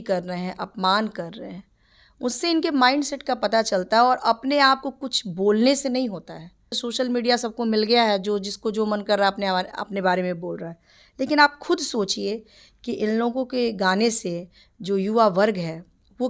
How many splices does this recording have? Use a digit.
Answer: 1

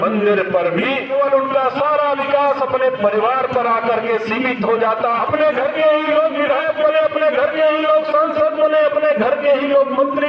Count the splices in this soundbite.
2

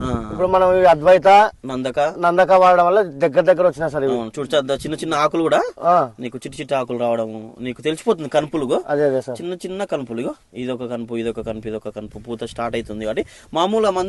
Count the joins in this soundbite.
0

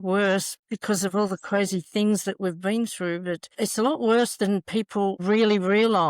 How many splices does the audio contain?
1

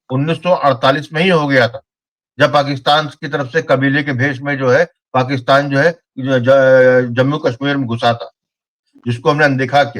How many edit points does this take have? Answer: 1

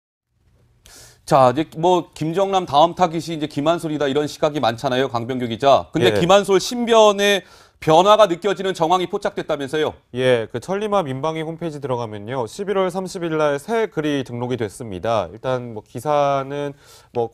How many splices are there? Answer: 1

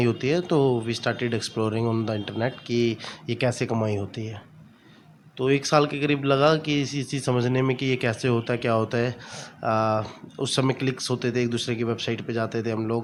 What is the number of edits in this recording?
0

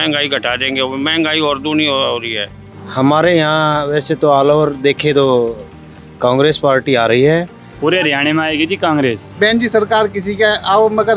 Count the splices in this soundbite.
3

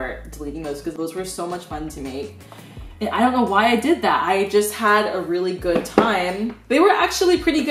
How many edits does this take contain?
0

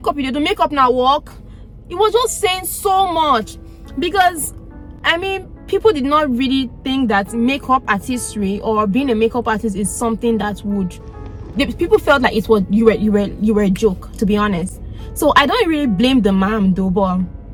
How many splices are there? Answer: 0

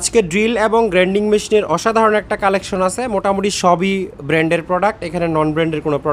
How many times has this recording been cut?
0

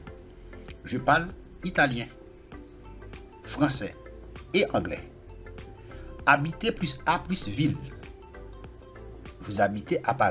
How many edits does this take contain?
2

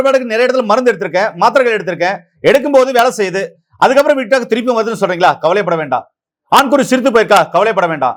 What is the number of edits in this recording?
0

